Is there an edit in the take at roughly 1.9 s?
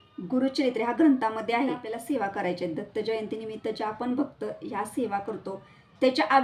yes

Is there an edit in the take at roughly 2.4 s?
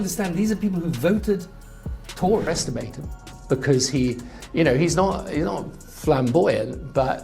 yes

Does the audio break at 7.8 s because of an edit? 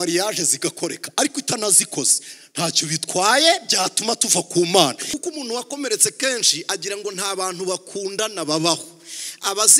no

